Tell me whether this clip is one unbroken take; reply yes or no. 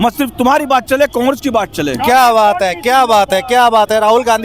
yes